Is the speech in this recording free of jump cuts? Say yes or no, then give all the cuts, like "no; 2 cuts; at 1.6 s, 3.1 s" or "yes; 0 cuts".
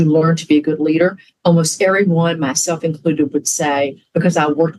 yes; 0 cuts